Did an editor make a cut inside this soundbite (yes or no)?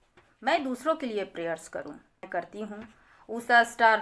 yes